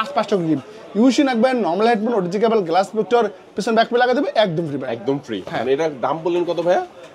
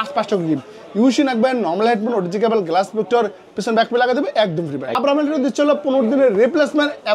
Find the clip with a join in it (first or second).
second